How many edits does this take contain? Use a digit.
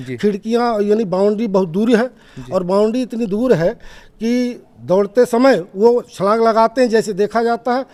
0